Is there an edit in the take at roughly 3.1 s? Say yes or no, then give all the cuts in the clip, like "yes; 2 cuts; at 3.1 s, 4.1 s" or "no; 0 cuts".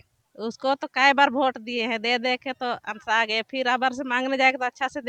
no; 0 cuts